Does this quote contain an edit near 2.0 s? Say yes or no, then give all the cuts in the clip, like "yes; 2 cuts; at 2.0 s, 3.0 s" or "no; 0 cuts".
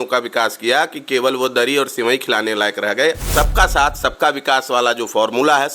no; 1 cut; at 3.3 s